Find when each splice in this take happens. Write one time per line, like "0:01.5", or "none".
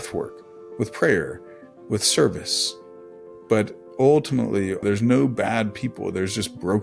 0:04.8

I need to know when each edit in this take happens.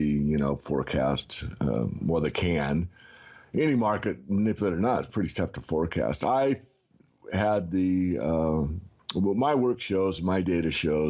none

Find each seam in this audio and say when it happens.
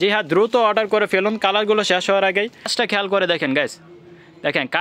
0:02.7

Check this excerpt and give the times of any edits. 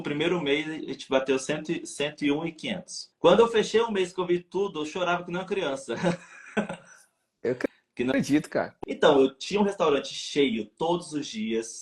0:08.8

